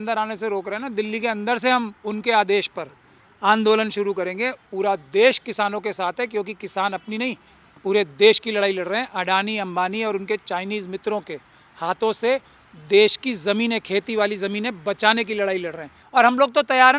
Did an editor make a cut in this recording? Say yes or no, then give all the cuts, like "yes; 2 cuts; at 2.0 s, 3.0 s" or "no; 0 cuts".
yes; 2 cuts; at 4.7 s, 15.9 s